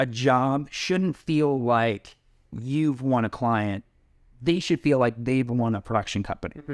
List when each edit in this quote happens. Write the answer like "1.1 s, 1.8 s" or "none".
none